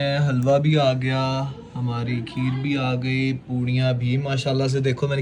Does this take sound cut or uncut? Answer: uncut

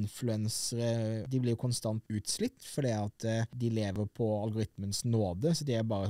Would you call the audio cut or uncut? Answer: cut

